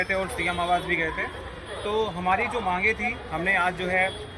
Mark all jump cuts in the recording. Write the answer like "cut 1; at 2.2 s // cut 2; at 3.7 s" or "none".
none